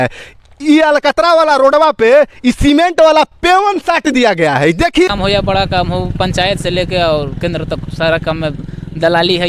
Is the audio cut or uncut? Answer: cut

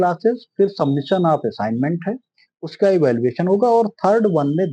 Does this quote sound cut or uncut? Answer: uncut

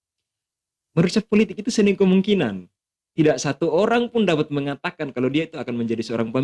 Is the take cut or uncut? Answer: uncut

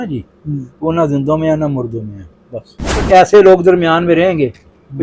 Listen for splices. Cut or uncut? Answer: cut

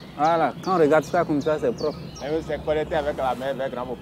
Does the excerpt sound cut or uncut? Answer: cut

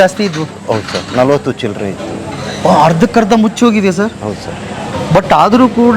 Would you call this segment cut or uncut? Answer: uncut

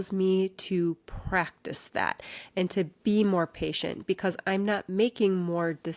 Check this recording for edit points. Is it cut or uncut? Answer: uncut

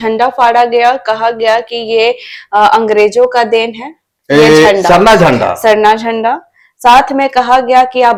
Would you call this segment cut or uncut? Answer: uncut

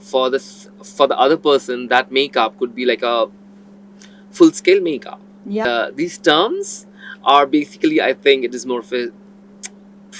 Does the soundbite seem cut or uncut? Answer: cut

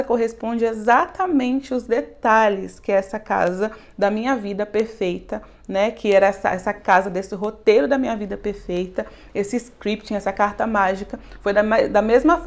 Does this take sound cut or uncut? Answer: uncut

